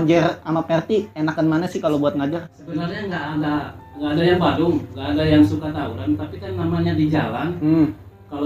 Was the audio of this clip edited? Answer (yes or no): yes